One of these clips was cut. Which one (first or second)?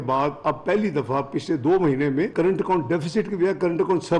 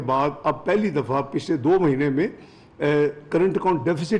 first